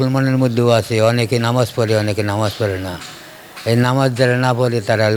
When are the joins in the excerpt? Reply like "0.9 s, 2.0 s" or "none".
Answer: none

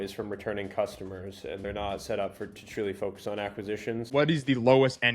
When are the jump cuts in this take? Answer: 1.6 s, 4.0 s

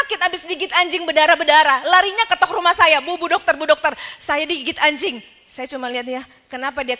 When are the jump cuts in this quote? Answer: none

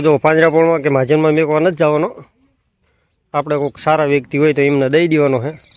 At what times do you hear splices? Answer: none

